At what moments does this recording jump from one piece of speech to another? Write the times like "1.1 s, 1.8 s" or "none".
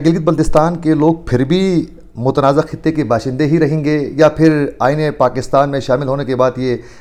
none